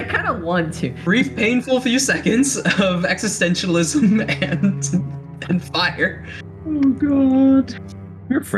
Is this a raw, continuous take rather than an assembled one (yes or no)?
no